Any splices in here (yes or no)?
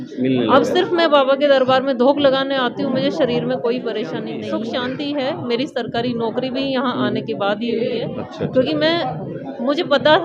yes